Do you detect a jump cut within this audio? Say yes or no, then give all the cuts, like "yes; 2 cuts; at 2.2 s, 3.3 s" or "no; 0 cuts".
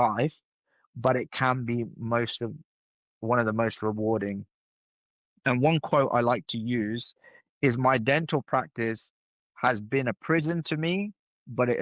no; 0 cuts